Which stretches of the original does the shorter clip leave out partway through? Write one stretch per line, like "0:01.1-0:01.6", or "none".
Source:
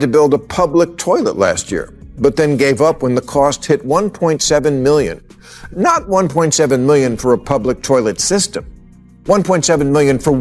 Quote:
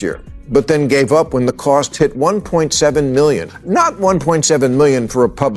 0:05.2-0:05.6